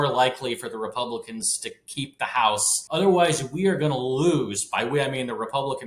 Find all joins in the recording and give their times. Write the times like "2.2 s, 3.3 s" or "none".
2.8 s